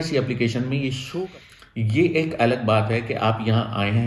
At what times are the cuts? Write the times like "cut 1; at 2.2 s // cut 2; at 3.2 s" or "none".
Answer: cut 1; at 1.3 s